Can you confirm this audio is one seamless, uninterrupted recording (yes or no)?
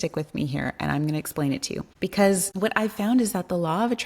no